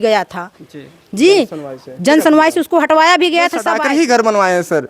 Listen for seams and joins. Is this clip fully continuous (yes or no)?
no